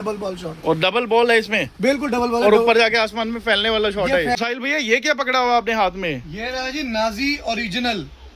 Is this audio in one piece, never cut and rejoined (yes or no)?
no